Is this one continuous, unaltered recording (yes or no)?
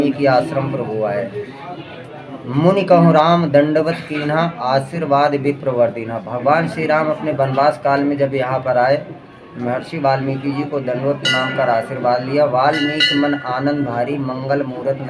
yes